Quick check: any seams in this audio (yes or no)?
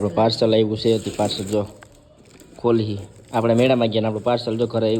no